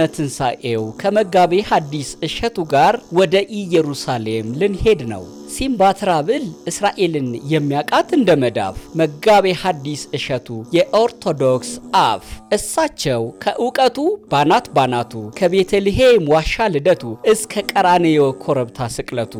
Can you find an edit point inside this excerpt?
no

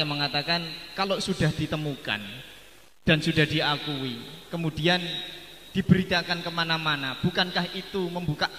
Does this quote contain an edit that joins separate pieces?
no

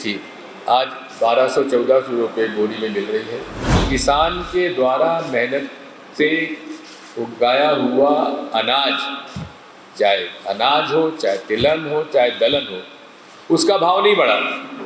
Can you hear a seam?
yes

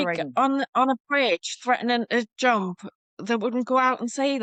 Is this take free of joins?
yes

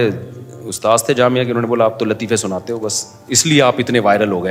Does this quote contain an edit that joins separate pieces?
no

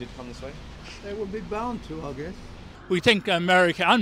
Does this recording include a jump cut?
yes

